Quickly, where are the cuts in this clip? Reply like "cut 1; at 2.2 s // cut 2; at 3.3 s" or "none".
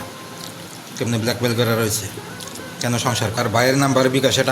cut 1; at 3.4 s